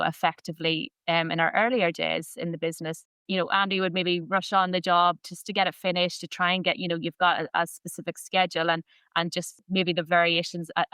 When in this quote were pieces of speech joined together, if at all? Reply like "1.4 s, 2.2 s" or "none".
3.1 s, 9.6 s